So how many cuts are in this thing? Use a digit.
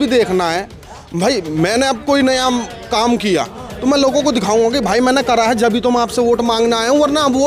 0